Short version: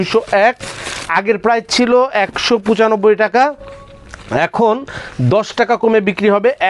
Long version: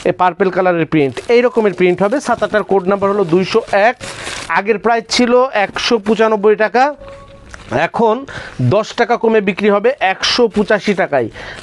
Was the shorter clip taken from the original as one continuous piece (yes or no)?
yes